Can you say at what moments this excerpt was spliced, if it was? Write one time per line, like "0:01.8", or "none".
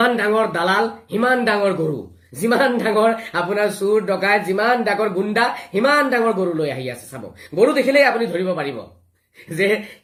none